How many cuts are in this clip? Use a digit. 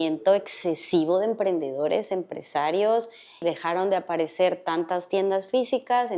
1